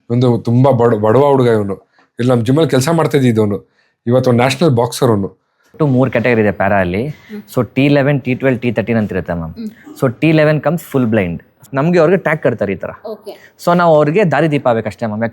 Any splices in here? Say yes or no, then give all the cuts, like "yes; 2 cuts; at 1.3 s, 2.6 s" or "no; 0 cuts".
yes; 2 cuts; at 5.8 s, 11.6 s